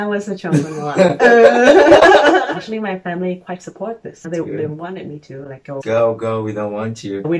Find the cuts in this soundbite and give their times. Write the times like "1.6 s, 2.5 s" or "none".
2.4 s, 4.1 s, 5.8 s